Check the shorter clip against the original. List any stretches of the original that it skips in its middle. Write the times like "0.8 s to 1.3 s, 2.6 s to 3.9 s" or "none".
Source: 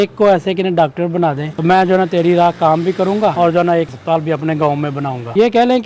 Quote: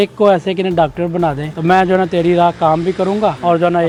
none